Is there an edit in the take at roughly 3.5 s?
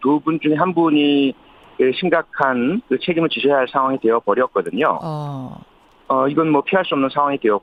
no; 0 cuts

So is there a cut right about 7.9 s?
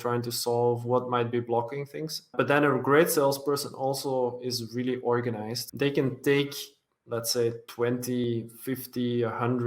yes; 3 cuts; at 2.3 s, 5.6 s, 7.9 s

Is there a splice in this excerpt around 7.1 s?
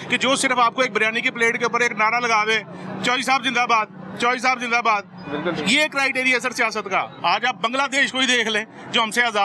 yes; 1 cut; at 7.1 s

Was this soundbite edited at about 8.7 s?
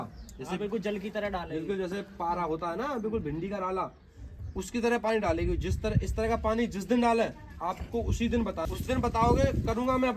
yes; 1 cut; at 8.7 s

